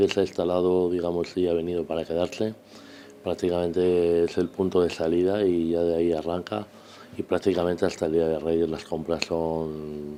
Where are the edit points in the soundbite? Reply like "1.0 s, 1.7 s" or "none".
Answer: none